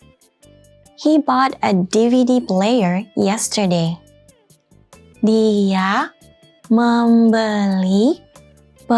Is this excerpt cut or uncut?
uncut